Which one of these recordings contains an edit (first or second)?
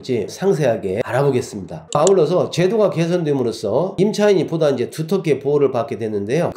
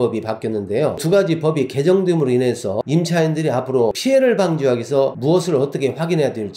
second